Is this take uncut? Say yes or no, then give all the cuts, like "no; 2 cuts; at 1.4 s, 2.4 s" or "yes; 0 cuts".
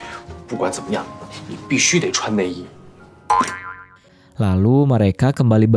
no; 1 cut; at 4.2 s